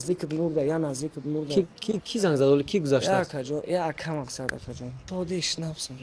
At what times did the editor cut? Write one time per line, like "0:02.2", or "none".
0:05.1